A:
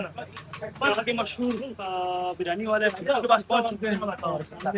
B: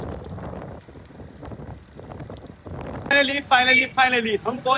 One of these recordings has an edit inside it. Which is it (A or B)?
B